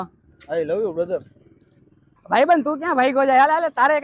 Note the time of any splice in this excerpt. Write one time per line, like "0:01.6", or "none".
0:01.8